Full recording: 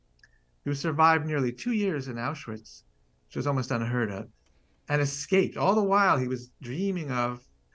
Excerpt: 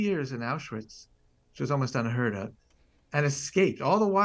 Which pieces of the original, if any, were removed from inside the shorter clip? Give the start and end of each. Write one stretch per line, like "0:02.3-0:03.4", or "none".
none